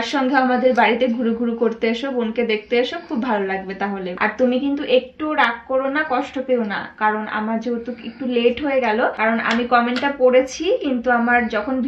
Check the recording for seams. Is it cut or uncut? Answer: uncut